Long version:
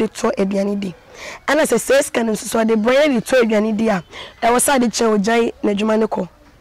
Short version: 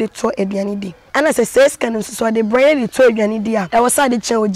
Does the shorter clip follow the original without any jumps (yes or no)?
no